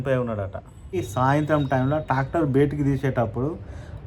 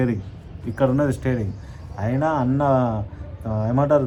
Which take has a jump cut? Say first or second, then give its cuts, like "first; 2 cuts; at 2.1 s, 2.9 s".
first; 1 cut; at 1.0 s